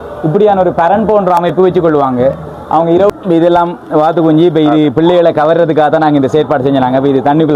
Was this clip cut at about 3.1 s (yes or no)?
yes